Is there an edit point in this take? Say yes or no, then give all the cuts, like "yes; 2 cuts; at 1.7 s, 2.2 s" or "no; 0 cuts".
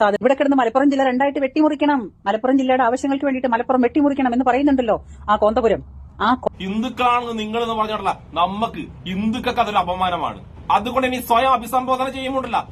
yes; 1 cut; at 6.4 s